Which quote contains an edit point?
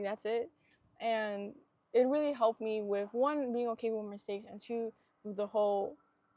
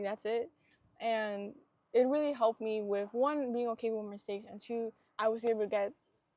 second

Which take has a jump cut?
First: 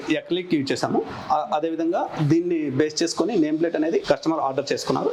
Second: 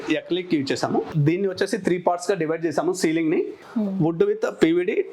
second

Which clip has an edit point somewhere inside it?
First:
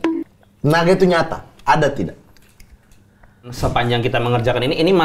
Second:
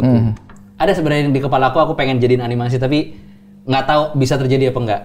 first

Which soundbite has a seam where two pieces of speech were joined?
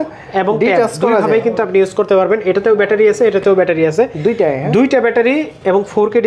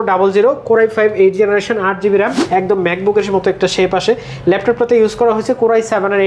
second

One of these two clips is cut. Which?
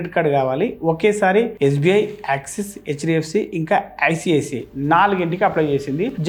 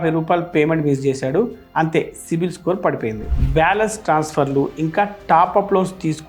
second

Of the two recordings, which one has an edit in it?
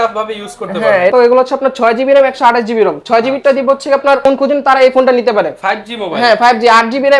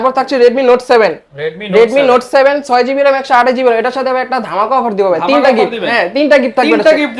first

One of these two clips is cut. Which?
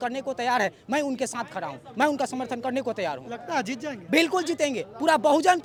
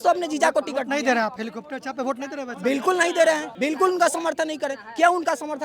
second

